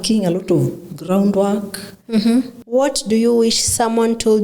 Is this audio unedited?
no; 1 cut; at 2.6 s

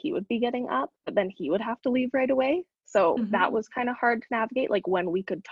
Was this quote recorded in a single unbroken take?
yes; 0 cuts

